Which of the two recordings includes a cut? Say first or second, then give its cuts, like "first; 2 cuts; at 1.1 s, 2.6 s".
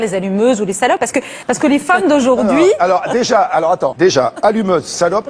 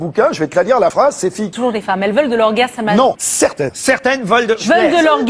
second; 1 cut; at 1.4 s